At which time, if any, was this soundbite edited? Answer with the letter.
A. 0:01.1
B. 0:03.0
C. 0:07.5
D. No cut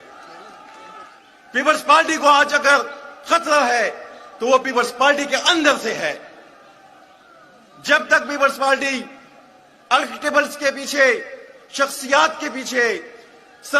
A